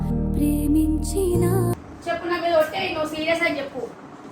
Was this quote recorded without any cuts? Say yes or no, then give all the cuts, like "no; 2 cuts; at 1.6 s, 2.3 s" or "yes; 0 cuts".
no; 1 cut; at 1.8 s